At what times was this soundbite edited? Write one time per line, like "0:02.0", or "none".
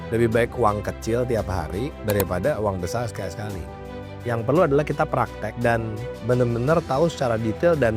0:04.1